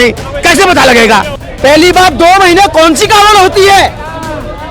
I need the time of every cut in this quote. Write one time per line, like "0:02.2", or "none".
0:01.4